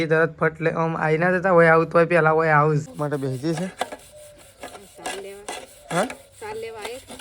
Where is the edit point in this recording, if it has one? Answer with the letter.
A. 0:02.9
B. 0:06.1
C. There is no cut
A